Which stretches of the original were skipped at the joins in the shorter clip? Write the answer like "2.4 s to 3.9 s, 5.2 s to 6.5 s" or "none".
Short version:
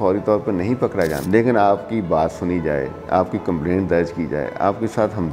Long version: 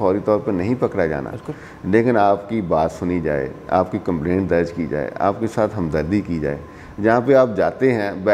1.2 s to 1.8 s